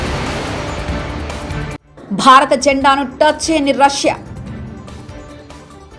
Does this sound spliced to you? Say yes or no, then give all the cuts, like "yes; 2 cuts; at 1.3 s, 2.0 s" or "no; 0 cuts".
yes; 1 cut; at 1.8 s